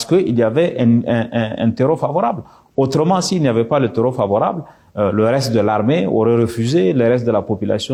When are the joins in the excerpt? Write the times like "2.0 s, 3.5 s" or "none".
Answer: none

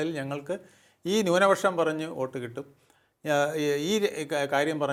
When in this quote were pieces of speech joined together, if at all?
none

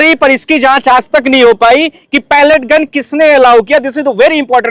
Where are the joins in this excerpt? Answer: none

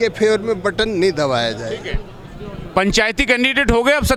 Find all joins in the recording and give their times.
none

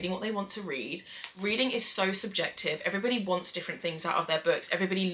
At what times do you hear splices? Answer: none

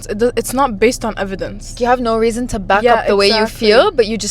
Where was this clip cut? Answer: 1.8 s

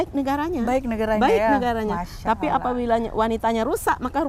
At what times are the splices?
none

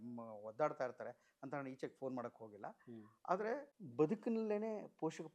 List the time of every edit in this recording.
3.8 s

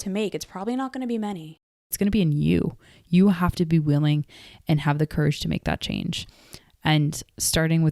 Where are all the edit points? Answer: 1.9 s

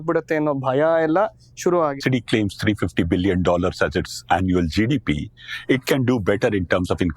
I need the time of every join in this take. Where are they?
2.0 s

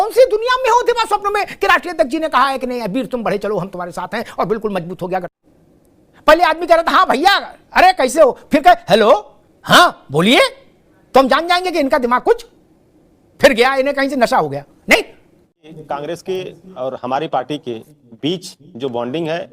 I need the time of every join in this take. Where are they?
5.4 s, 15.8 s

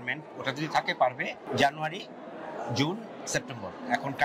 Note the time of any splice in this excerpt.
1.5 s

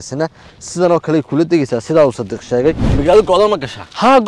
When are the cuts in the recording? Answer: 2.9 s

